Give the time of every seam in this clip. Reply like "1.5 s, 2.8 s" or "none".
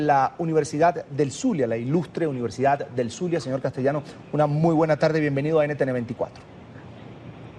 1.4 s